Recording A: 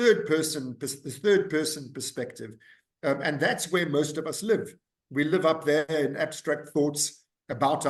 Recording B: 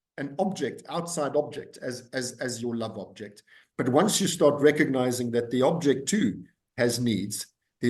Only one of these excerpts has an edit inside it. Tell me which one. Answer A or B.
B